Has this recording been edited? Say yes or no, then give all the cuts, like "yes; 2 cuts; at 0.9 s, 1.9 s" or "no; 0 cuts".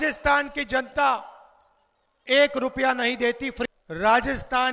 yes; 1 cut; at 3.8 s